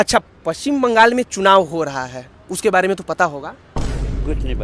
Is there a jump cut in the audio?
no; 0 cuts

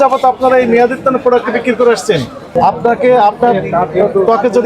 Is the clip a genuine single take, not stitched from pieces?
no; 1 cut; at 2.4 s

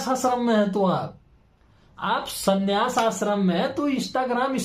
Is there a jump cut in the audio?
no; 0 cuts

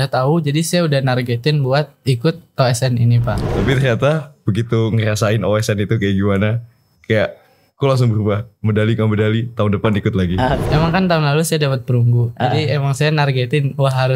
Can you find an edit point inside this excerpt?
yes; 2 cuts; at 3.4 s, 10.6 s

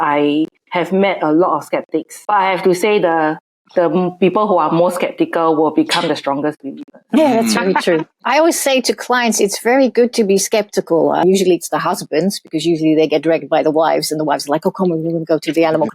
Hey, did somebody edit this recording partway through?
yes; 2 cuts; at 8.1 s, 11.2 s

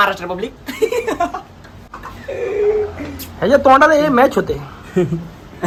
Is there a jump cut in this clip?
no; 0 cuts

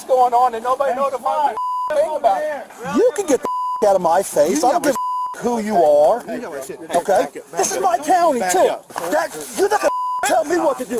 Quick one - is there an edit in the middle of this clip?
yes; 2 cuts; at 2.8 s, 8.8 s

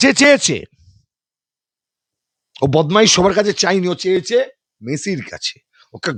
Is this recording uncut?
yes; 0 cuts

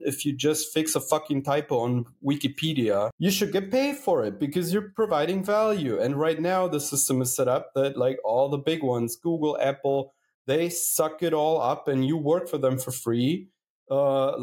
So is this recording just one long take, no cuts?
no; 1 cut; at 3.1 s

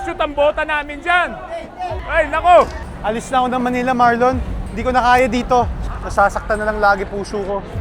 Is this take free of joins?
no; 2 cuts; at 2.1 s, 2.8 s

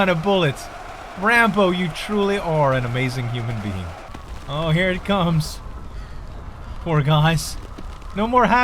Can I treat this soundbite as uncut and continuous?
no; 1 cut; at 4.0 s

